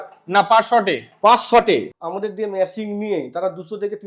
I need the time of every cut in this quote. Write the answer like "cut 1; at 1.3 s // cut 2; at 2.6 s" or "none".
cut 1; at 1.9 s